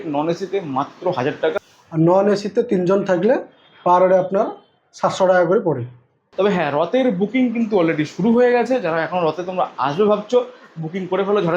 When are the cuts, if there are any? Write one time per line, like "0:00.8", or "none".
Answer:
0:01.6
0:06.2